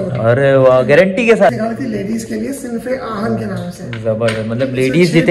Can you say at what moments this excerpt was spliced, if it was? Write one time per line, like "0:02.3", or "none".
0:01.5